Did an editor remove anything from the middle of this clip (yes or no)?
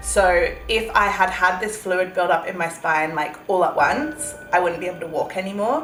no